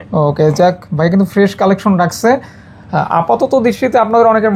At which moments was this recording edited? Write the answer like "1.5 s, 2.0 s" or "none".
none